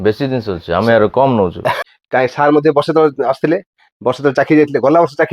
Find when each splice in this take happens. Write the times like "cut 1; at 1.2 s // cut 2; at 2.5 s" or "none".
cut 1; at 1.8 s